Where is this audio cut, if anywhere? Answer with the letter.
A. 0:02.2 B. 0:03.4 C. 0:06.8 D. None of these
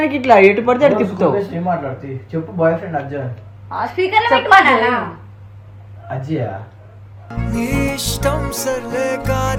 D